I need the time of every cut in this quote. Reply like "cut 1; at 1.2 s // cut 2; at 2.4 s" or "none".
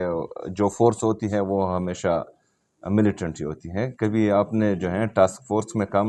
none